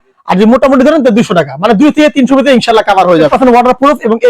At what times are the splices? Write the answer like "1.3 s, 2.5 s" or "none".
3.3 s